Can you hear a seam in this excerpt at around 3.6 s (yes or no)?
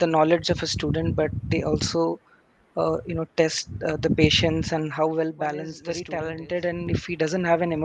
no